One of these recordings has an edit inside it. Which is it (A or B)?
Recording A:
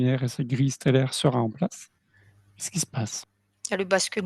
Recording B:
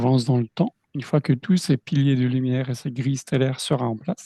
A